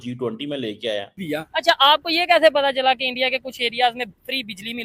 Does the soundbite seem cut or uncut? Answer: cut